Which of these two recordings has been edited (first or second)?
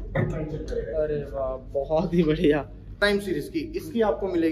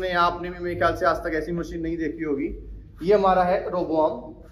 first